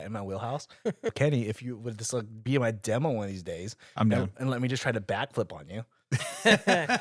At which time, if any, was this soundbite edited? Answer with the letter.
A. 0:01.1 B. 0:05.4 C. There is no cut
A